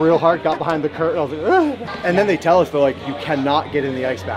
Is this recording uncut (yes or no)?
no